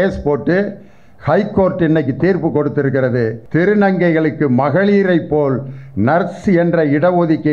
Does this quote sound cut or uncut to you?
cut